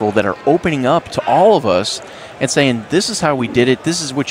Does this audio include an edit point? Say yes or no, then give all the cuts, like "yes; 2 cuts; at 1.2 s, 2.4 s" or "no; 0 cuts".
no; 0 cuts